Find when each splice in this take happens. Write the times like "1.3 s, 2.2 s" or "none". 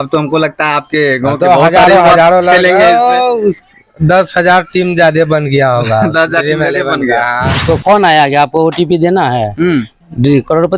7.5 s